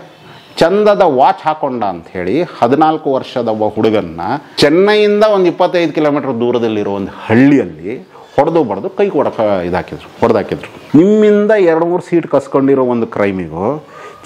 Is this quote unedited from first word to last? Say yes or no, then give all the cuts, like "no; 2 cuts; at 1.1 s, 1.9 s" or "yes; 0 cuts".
no; 2 cuts; at 4.5 s, 10.7 s